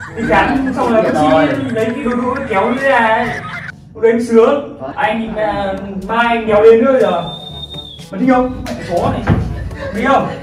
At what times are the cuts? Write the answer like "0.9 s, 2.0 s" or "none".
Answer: 4.8 s